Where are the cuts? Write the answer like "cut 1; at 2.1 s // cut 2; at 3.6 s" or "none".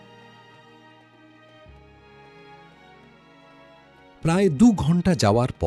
none